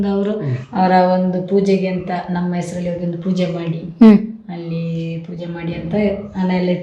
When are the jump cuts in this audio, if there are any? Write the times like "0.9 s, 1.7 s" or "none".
none